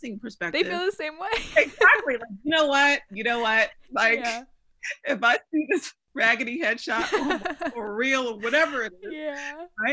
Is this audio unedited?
no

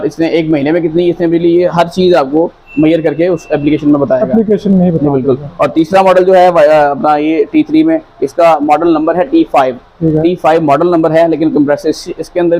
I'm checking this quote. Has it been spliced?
no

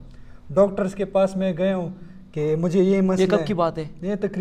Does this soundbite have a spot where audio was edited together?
no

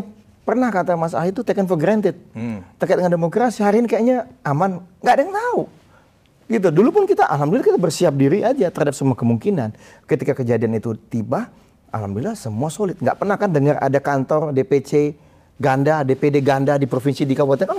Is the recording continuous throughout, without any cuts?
yes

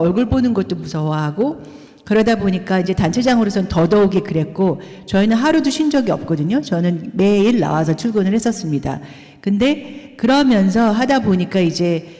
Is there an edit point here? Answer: no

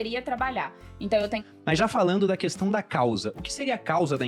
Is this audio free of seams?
no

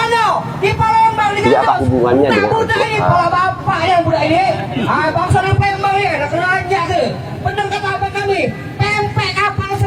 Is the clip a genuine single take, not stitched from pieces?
yes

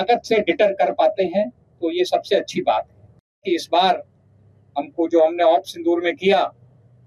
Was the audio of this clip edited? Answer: yes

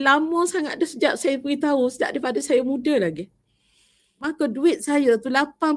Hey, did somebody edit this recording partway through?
yes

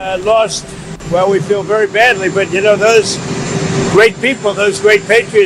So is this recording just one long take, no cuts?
no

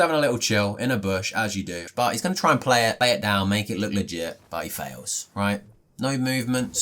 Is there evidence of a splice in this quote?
yes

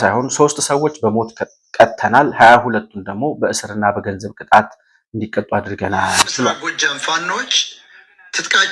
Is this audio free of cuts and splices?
no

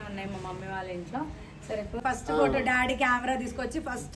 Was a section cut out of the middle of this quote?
yes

